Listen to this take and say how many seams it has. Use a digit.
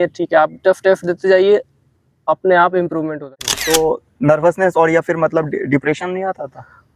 1